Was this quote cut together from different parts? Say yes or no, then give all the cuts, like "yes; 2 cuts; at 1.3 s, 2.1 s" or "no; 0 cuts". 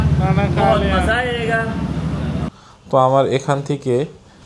yes; 1 cut; at 2.5 s